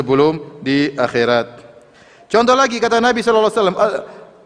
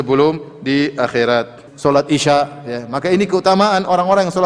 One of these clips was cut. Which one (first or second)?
second